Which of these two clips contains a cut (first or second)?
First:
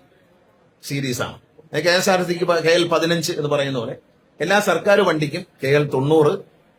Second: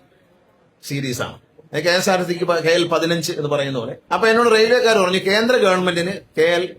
second